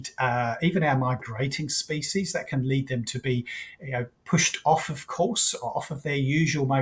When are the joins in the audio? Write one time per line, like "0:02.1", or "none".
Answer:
none